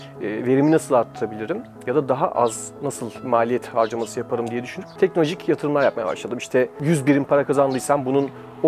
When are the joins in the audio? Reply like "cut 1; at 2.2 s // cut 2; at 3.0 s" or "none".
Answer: cut 1; at 3.2 s // cut 2; at 4.8 s // cut 3; at 6.8 s